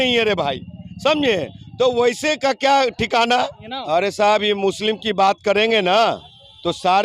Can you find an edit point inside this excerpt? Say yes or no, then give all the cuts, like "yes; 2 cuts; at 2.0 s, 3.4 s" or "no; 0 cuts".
yes; 1 cut; at 3.7 s